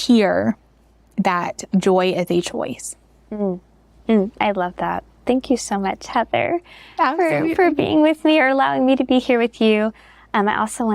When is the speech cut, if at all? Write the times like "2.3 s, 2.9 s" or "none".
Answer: none